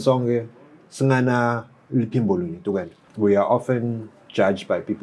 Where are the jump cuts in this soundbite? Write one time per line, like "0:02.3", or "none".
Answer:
0:03.0